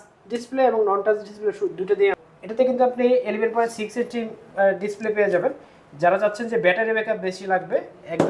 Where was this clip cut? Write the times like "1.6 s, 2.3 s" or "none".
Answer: 2.2 s